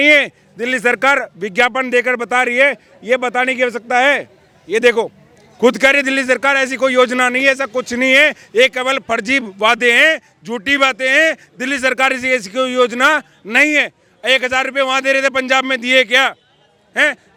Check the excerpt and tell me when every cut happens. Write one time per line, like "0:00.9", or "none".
none